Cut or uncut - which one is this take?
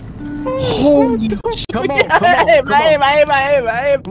cut